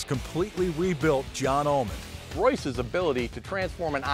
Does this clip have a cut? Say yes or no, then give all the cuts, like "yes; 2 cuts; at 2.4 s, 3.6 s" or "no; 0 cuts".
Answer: yes; 1 cut; at 2.3 s